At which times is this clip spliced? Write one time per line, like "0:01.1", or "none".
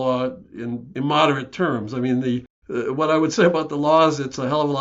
0:00.9
0:02.6